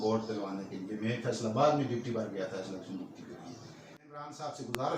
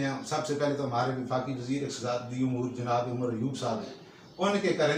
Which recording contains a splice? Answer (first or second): first